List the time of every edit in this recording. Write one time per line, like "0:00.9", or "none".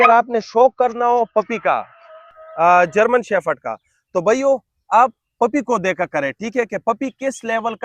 none